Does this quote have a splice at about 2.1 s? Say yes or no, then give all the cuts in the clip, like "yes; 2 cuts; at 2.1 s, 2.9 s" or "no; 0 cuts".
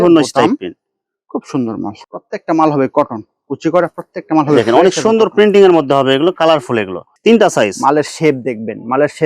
yes; 2 cuts; at 2.1 s, 7.0 s